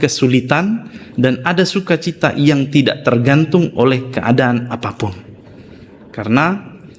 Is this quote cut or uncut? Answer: uncut